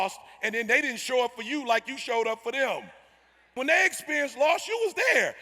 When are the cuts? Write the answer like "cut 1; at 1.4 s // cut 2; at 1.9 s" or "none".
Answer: cut 1; at 3.4 s